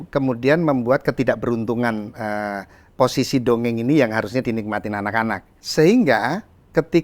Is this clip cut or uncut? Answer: cut